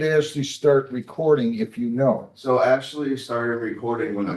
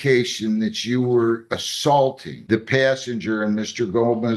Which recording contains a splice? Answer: second; 1 cut; at 2.3 s

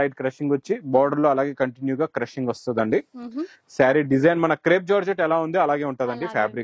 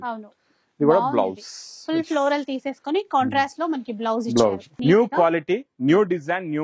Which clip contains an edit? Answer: second; 1 cut; at 4.7 s

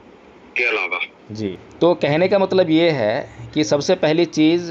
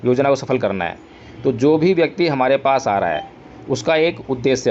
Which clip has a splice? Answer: first; 1 cut; at 1.4 s

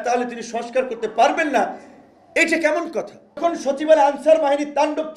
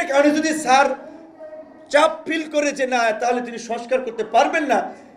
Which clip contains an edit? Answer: first; 1 cut; at 3.2 s

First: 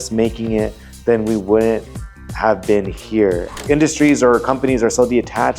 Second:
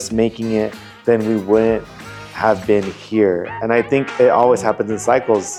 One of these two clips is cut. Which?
first; 1 cut; at 3.5 s

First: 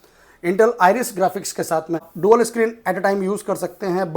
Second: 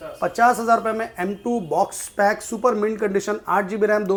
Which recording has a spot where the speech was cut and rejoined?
first; 1 cut; at 2.1 s

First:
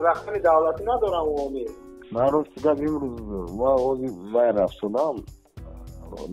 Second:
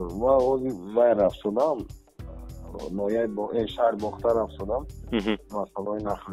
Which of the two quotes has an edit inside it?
first; 1 cut; at 1.8 s

